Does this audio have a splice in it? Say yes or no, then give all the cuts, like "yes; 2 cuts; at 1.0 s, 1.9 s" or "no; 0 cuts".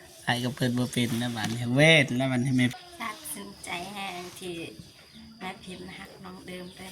yes; 1 cut; at 2.7 s